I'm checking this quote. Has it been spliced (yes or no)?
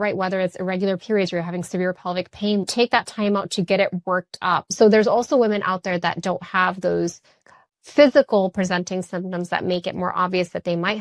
yes